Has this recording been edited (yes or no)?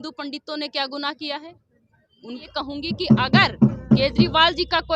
yes